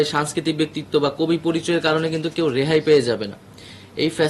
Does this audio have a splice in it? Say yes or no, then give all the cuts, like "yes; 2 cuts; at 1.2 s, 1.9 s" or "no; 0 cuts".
no; 0 cuts